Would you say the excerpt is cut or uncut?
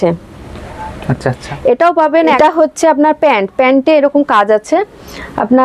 cut